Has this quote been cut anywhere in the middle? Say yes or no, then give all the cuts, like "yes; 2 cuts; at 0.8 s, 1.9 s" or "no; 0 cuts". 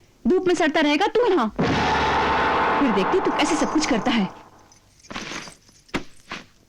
no; 0 cuts